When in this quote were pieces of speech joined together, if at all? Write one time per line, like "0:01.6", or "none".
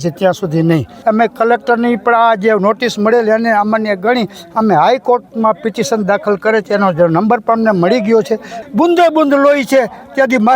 0:00.9
0:08.5